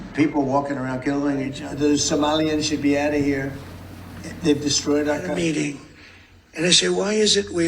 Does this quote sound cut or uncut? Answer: cut